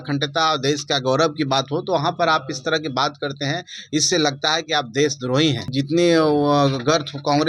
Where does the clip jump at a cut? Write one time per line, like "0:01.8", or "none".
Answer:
0:05.7